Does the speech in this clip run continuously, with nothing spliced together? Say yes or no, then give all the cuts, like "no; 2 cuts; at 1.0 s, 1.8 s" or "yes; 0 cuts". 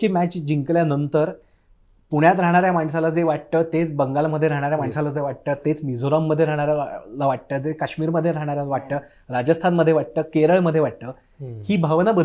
yes; 0 cuts